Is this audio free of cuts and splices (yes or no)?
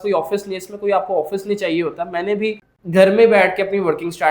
no